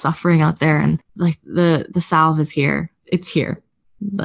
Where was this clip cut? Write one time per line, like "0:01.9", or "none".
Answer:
0:01.1
0:02.9